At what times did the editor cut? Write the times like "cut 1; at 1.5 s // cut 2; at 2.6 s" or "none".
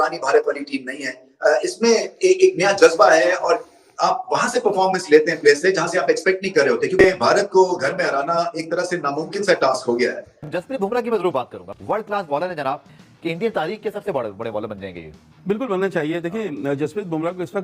cut 1; at 10.3 s // cut 2; at 13.0 s